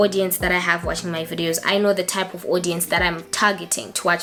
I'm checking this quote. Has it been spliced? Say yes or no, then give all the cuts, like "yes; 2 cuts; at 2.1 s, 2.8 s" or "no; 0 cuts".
no; 0 cuts